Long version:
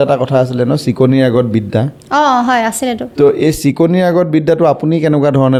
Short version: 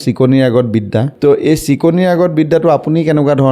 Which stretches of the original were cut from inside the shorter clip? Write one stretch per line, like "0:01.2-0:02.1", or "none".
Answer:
0:01.9-0:03.1